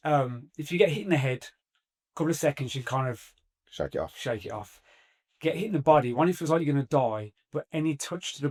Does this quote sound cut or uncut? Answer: uncut